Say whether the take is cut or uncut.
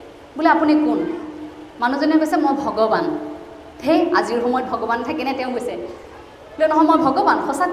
uncut